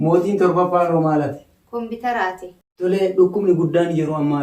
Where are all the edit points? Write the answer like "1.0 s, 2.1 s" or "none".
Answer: 2.8 s